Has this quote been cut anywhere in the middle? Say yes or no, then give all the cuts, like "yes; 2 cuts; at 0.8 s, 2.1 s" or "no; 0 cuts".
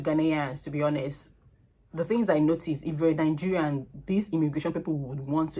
no; 0 cuts